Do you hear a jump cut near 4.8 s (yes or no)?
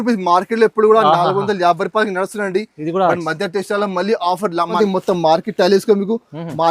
yes